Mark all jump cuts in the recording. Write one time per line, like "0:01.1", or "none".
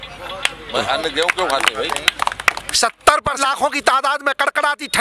0:03.3